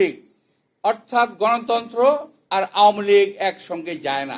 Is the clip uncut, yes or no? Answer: no